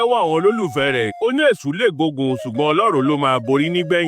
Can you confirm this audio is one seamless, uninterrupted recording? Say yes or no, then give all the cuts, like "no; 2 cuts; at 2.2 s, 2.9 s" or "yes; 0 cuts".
yes; 0 cuts